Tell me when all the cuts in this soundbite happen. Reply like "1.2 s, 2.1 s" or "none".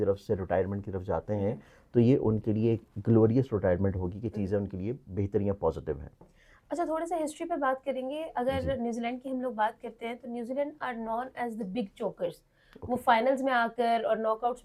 none